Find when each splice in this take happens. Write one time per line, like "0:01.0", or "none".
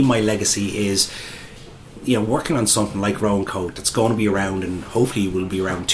0:02.0